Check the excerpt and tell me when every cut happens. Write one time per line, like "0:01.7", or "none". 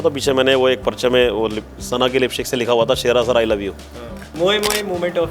0:04.2